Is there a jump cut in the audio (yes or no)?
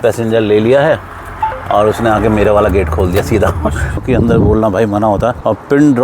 yes